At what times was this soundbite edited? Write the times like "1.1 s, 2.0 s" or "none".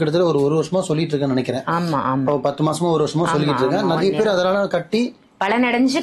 none